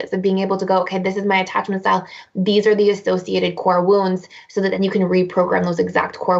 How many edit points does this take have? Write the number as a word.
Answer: zero